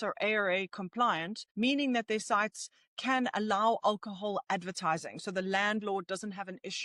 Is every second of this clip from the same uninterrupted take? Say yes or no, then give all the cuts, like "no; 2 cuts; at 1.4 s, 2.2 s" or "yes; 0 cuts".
no; 1 cut; at 1.4 s